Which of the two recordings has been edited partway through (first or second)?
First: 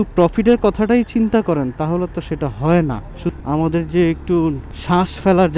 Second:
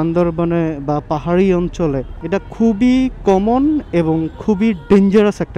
first